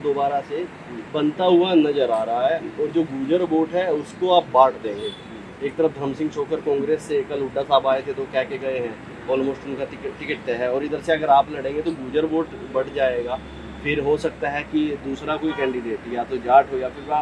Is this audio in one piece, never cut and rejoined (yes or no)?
yes